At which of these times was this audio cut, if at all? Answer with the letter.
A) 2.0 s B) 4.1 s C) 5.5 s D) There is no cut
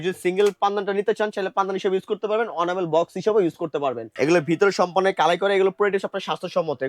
B